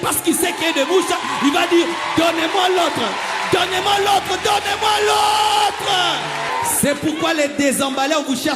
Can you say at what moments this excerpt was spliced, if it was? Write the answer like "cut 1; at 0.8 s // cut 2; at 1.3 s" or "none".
cut 1; at 6.5 s